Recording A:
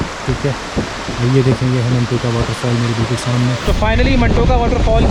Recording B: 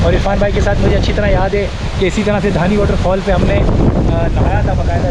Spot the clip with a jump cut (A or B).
A